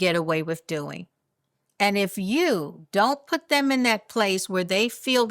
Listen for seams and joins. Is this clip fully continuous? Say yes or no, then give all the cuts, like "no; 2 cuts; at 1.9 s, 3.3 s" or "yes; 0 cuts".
yes; 0 cuts